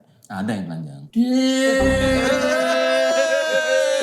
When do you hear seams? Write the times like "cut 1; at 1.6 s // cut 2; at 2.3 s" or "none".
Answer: cut 1; at 1.0 s